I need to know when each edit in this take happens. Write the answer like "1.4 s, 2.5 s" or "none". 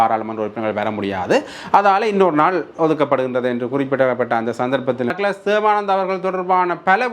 5.1 s